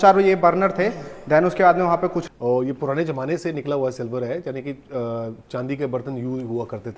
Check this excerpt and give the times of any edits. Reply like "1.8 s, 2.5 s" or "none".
2.2 s

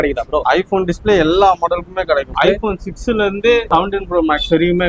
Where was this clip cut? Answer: 2.3 s, 3.7 s

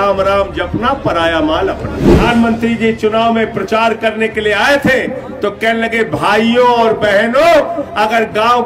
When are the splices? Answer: 2.2 s

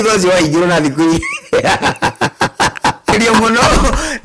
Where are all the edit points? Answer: 3.1 s

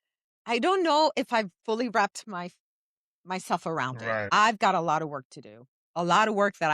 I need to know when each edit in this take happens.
4.2 s

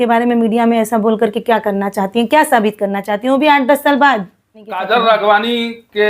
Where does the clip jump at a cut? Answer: 4.8 s

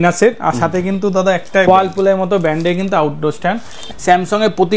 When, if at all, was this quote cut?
1.7 s, 3.9 s

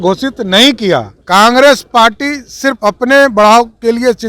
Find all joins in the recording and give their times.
1.2 s

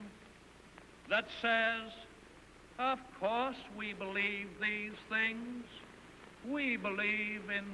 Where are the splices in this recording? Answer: 5.7 s

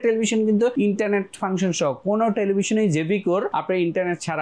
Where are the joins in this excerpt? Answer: 0.7 s, 3.5 s

